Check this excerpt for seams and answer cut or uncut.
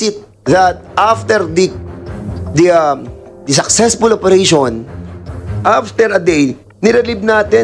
uncut